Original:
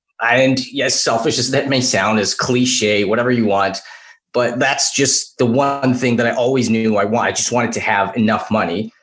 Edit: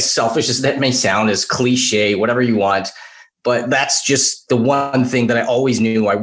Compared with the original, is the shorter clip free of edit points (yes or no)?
yes